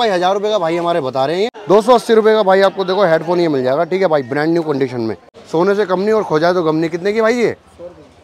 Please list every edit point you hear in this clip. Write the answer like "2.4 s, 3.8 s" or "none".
1.6 s, 5.3 s